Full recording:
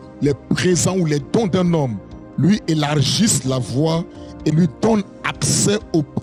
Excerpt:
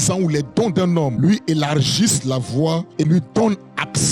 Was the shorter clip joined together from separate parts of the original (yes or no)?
yes